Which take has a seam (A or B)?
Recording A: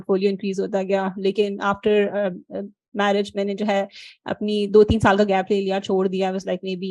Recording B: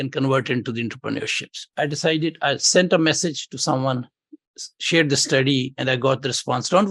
B